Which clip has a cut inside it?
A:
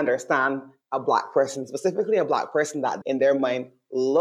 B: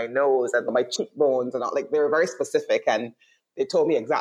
A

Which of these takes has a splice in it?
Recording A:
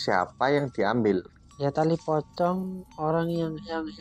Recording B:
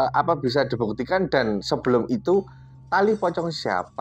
A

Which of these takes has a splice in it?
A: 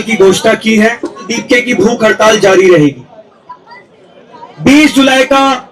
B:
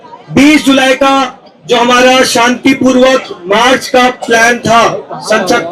A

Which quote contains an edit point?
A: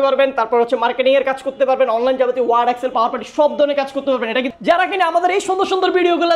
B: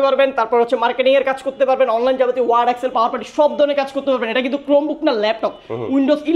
A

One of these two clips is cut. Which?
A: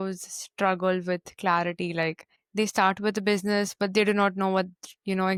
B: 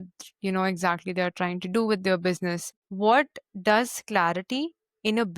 B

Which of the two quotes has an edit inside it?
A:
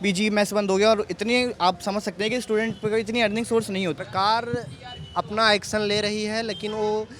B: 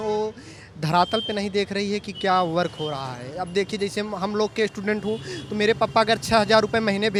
A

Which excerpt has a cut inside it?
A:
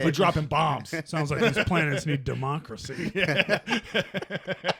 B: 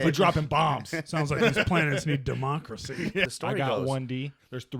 B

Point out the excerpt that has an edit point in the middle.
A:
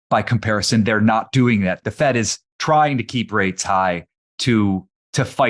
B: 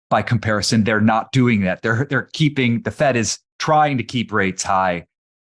A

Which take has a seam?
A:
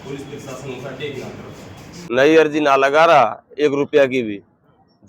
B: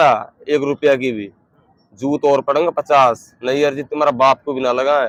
A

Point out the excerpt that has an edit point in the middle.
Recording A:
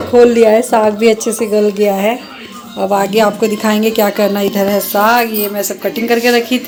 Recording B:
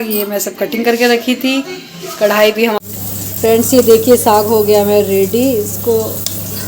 B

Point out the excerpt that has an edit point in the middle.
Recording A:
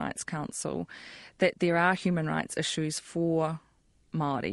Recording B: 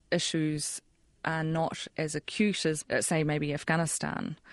B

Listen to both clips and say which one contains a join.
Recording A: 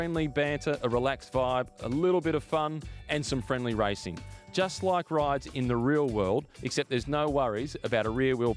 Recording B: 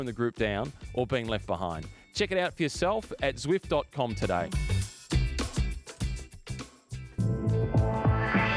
B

